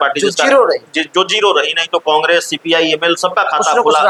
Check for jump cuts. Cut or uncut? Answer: uncut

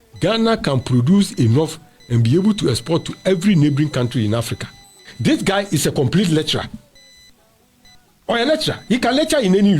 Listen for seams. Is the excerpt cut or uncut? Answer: cut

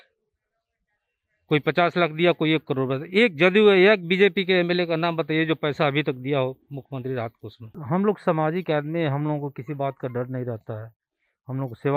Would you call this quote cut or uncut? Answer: cut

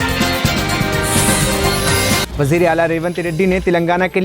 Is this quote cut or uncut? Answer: cut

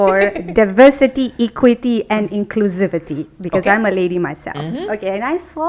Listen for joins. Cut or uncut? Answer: uncut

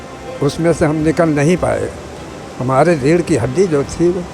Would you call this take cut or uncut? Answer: uncut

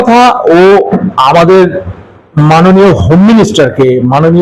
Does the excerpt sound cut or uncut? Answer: uncut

